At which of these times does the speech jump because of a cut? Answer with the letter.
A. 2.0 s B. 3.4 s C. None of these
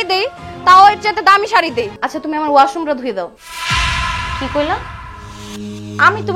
A